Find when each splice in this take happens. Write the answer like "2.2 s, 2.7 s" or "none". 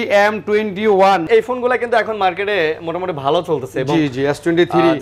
1.2 s

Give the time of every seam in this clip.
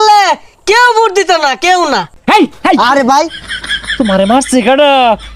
2.1 s

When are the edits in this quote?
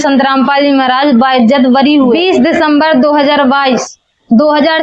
2.2 s

